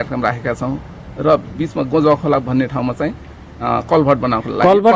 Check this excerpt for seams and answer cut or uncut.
uncut